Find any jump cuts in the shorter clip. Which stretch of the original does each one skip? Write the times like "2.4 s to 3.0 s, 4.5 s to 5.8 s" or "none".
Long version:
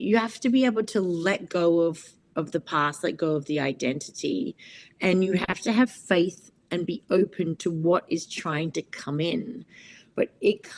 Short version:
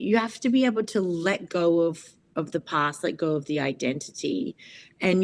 none